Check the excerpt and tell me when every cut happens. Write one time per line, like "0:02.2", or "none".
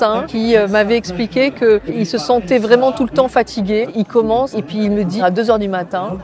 0:03.9
0:05.2